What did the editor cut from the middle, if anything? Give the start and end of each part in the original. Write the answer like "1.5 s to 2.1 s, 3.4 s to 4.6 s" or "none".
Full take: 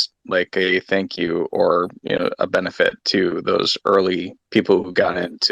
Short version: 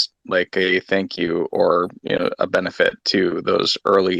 none